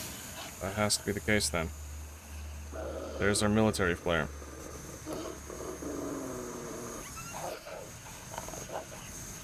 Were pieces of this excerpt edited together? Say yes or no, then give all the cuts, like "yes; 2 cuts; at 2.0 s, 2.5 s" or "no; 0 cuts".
no; 0 cuts